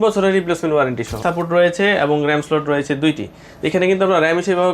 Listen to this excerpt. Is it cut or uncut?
cut